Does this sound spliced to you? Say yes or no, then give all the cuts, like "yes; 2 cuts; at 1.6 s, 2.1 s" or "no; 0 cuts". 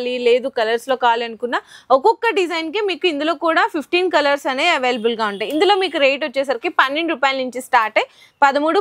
no; 0 cuts